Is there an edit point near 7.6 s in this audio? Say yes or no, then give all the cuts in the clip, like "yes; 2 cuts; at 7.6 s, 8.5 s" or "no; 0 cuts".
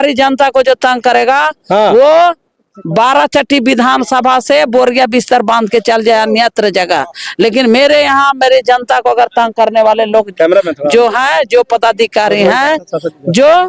no; 0 cuts